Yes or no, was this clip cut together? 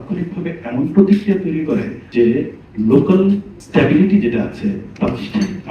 yes